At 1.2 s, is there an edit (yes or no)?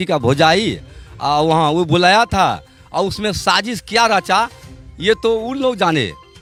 no